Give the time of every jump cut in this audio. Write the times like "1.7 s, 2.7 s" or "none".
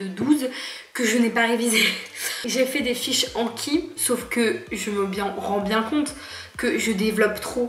none